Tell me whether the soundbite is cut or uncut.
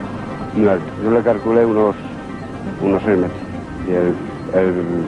cut